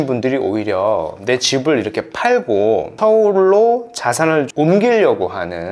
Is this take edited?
yes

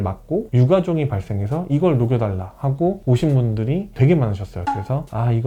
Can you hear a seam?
no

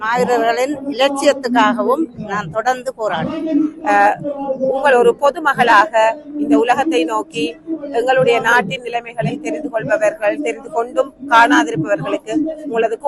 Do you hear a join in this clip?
no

